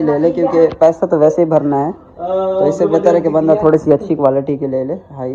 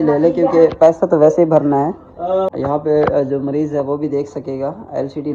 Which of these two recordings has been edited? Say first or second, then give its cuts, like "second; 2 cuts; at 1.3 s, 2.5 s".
second; 1 cut; at 2.5 s